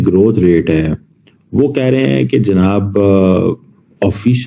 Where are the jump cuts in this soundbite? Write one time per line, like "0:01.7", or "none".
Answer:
none